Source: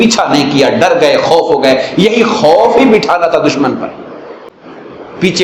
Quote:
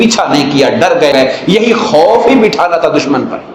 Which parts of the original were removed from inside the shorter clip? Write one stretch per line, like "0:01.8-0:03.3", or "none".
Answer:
0:01.1-0:01.6